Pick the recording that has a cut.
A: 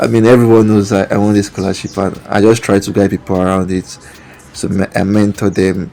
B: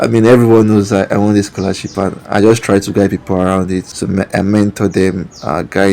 B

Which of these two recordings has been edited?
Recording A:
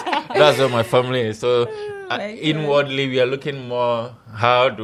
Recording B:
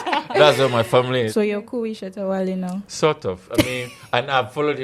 B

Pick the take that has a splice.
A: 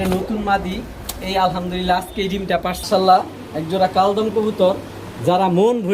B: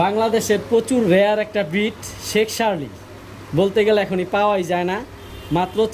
A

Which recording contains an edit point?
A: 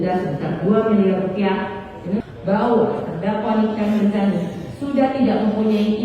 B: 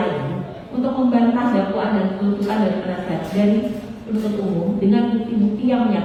A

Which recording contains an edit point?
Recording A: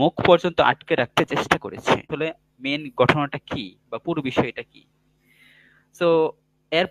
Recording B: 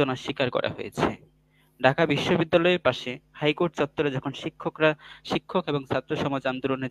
A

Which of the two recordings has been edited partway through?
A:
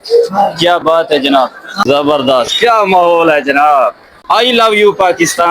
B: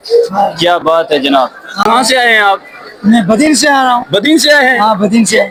A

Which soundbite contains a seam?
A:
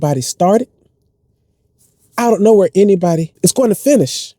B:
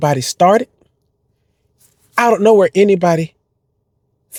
A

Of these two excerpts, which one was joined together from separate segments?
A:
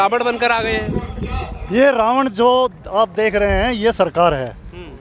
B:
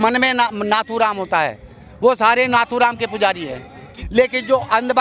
B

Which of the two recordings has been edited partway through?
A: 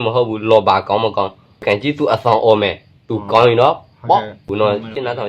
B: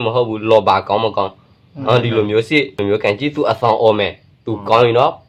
A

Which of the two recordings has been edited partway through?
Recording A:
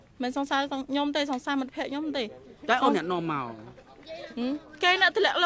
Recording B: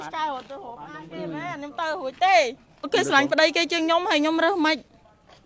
B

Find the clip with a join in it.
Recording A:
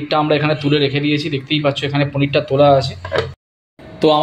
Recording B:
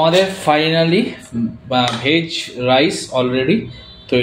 A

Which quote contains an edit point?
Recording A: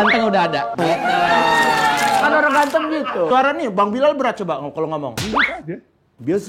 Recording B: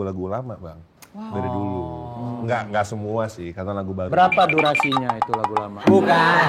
A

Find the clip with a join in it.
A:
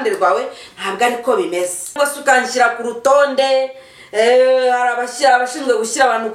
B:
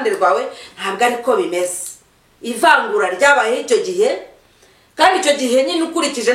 A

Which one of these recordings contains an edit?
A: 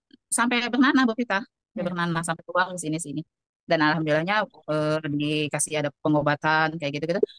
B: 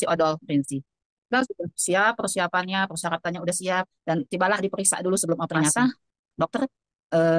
B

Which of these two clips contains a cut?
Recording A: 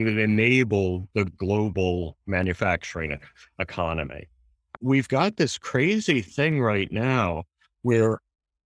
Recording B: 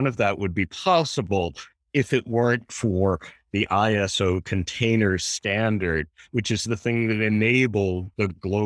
A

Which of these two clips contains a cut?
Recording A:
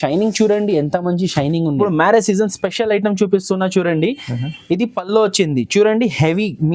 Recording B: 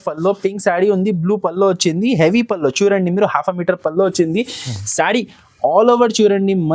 A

